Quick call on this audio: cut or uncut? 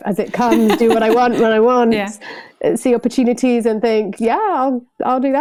uncut